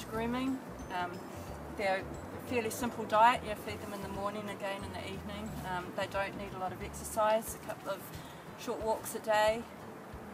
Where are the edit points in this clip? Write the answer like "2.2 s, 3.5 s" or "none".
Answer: none